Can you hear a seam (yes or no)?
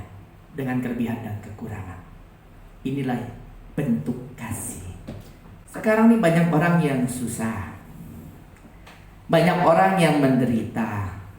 yes